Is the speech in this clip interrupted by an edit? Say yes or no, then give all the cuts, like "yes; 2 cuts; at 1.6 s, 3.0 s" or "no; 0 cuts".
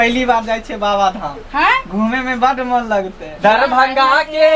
yes; 1 cut; at 3.3 s